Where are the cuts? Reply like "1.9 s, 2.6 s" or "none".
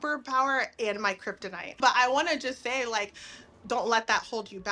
1.8 s